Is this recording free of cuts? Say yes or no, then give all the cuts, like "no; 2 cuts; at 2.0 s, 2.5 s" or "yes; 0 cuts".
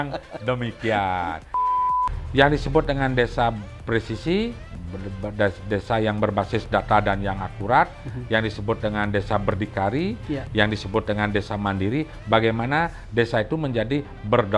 no; 1 cut; at 1.6 s